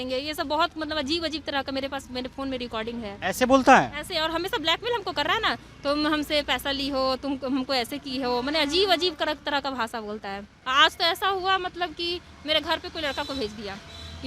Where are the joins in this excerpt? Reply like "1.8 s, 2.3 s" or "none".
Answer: none